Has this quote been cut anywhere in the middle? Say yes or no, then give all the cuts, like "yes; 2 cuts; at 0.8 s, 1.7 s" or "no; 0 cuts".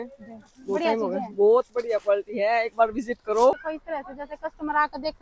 yes; 1 cut; at 3.7 s